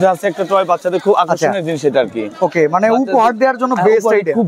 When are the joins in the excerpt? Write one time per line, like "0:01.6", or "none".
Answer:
none